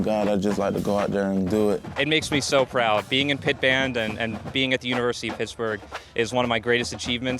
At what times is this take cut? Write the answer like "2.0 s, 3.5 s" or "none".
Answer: 1.9 s